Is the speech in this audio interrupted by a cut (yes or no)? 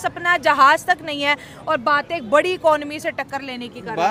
no